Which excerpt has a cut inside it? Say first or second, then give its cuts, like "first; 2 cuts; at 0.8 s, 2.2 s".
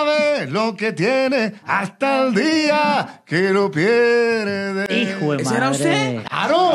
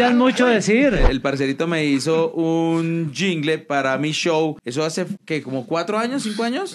second; 2 cuts; at 1.0 s, 5.0 s